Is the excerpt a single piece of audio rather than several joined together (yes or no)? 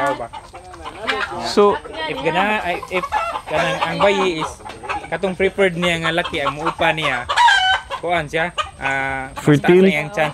yes